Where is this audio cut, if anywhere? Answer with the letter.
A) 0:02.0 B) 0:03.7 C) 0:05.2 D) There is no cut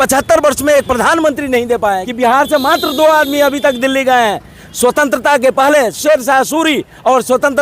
A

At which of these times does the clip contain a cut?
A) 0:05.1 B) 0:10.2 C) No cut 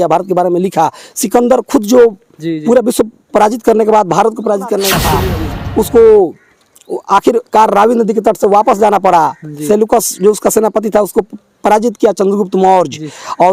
A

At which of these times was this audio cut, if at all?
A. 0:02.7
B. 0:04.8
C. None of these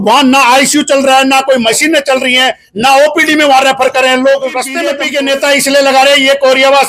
B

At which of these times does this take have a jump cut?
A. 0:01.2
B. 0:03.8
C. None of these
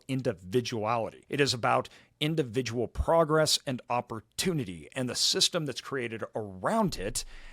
A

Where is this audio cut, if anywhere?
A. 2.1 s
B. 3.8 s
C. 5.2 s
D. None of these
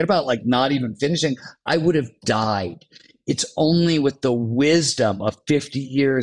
D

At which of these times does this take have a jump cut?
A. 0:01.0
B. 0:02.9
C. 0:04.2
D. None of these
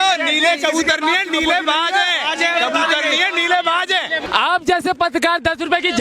C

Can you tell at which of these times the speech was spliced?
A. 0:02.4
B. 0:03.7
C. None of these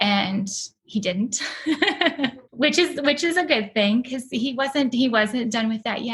A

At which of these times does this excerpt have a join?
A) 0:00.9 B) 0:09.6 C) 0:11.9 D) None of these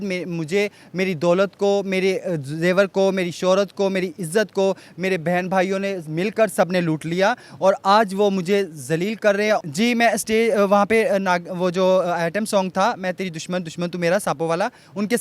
B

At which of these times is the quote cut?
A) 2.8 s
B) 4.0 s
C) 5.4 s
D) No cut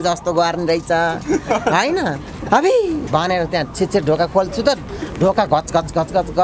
D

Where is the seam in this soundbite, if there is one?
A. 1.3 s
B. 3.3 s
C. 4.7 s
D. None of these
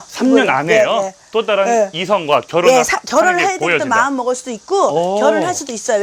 D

